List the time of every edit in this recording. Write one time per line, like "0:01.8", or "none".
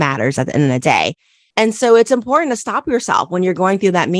none